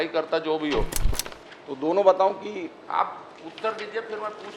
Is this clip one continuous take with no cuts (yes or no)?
no